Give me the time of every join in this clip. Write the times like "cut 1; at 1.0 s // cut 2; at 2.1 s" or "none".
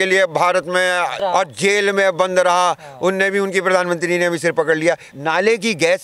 cut 1; at 1.2 s // cut 2; at 5.1 s